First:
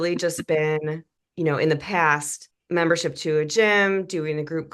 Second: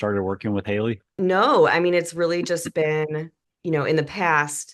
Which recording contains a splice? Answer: second; 1 cut; at 1.1 s

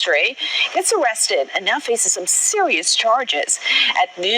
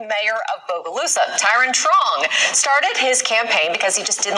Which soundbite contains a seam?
second; 1 cut; at 1.8 s

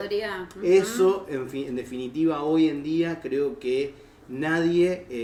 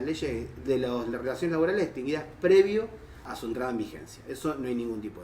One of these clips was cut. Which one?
second; 1 cut; at 3.2 s

